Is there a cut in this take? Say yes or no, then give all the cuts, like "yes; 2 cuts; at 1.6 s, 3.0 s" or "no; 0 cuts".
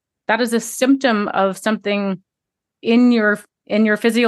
no; 0 cuts